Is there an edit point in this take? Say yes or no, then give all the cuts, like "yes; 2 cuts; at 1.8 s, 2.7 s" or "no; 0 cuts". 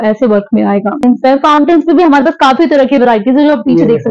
yes; 1 cut; at 1.0 s